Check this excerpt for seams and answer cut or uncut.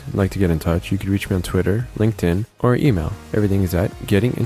uncut